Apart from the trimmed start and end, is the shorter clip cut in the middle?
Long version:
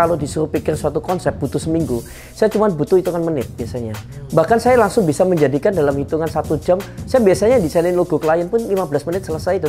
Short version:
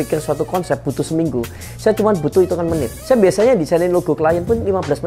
yes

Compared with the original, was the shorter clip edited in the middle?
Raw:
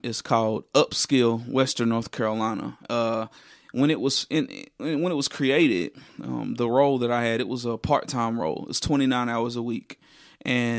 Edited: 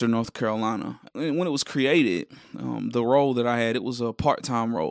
yes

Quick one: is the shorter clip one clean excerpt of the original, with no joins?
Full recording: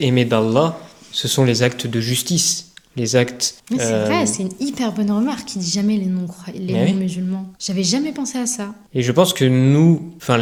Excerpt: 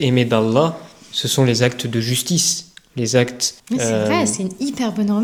yes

